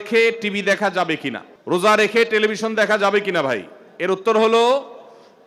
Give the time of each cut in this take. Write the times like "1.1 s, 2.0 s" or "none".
none